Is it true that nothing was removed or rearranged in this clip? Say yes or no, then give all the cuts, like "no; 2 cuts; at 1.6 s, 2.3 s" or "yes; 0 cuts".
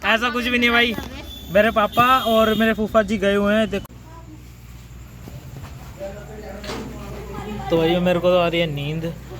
no; 1 cut; at 3.8 s